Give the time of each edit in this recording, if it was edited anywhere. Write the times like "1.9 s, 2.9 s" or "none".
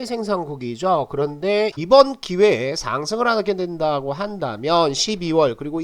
1.8 s

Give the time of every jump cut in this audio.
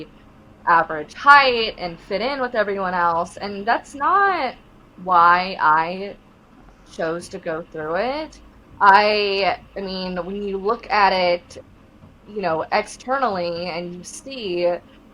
none

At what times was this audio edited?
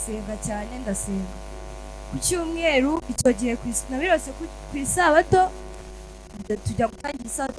5.7 s

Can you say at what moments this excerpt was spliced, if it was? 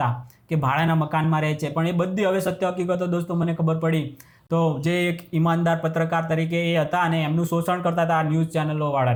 none

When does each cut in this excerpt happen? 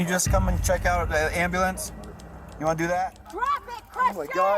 3.2 s

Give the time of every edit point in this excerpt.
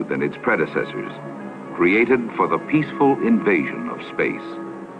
3.1 s

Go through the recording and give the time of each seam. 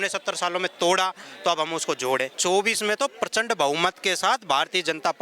2.3 s

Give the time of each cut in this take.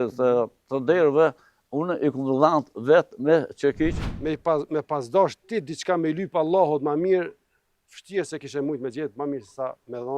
4.0 s

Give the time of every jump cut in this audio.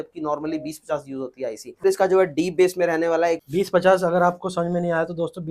1.8 s, 3.4 s

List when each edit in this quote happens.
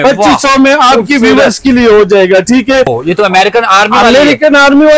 2.9 s

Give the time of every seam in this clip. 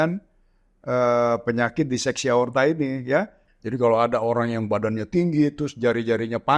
3.5 s

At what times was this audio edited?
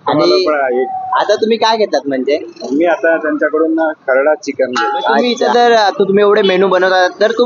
5.4 s

